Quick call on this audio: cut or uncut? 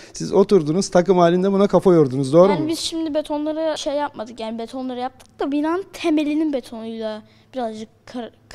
uncut